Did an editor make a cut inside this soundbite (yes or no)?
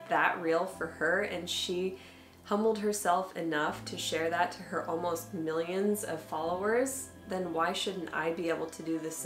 no